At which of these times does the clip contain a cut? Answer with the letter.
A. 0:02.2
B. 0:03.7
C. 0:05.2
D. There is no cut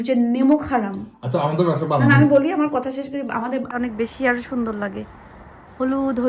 B